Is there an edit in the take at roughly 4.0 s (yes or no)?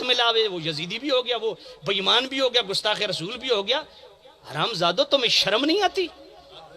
no